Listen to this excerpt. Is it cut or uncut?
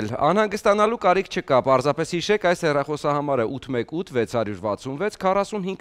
uncut